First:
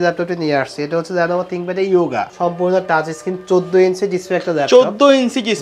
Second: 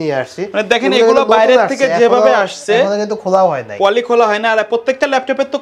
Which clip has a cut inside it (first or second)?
first